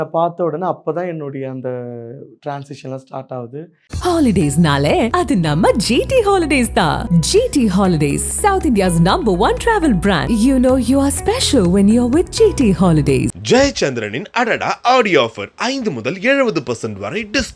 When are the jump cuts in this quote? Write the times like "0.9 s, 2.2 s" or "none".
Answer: 3.8 s